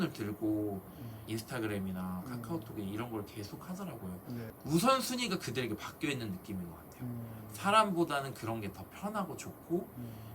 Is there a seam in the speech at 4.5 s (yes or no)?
yes